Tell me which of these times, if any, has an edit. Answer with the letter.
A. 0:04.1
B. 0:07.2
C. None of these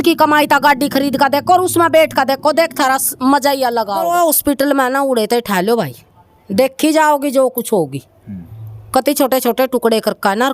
A